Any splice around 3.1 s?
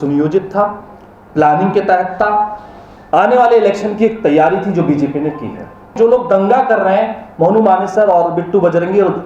no; 1 cut; at 5.9 s

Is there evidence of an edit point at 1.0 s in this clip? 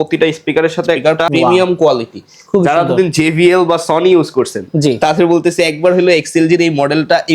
yes; 1 cut; at 1.0 s

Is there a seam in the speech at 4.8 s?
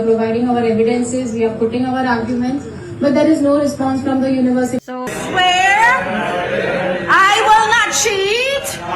yes; 1 cut; at 4.8 s

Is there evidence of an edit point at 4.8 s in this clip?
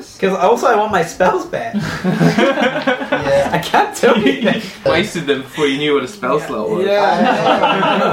yes; 1 cut; at 4.8 s

